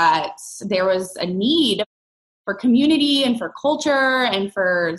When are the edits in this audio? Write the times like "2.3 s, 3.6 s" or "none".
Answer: none